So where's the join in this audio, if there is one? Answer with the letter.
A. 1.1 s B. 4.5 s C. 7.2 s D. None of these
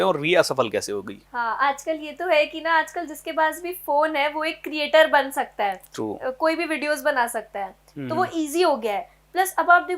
D